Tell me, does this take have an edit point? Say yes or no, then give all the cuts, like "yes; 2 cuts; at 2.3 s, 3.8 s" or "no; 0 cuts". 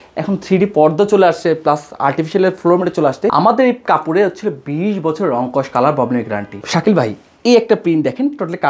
yes; 2 cuts; at 3.3 s, 6.6 s